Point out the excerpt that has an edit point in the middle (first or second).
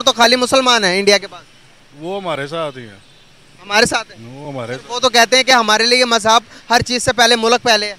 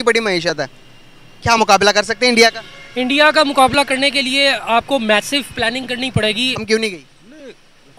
second